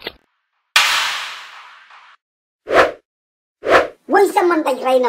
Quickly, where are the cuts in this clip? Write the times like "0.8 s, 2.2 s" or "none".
4.0 s